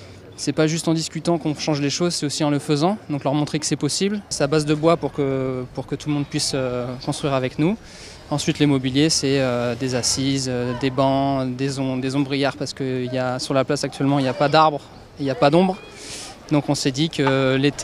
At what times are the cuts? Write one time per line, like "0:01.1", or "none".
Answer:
none